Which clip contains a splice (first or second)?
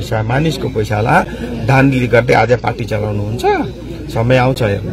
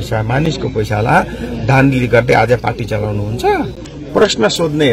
second